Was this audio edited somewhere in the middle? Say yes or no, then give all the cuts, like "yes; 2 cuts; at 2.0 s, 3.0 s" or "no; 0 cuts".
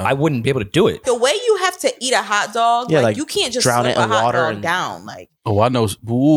yes; 1 cut; at 1.0 s